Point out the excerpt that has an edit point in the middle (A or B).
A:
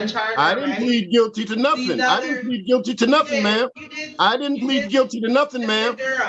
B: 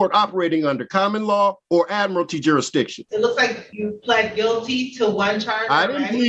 B